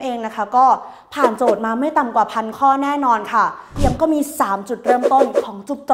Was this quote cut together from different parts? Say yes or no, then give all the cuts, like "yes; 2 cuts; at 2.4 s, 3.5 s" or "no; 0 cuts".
yes; 1 cut; at 3.7 s